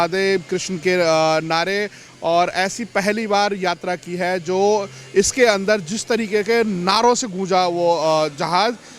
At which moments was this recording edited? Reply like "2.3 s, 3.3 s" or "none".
none